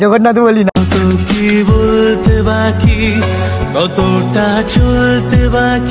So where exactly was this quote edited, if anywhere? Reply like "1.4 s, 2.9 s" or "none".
none

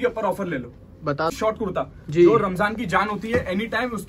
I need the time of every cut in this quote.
1.3 s

